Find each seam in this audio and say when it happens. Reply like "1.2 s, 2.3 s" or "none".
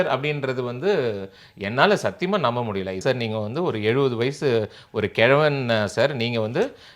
3.0 s